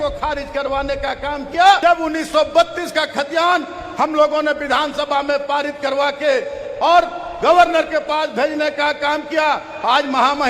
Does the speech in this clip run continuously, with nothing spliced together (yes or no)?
no